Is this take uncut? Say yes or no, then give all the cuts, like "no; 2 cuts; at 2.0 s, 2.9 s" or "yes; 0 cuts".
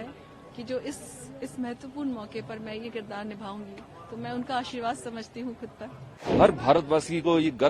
no; 1 cut; at 6.3 s